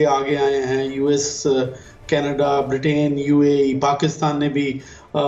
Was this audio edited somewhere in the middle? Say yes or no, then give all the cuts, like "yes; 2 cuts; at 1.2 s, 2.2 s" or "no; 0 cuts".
no; 0 cuts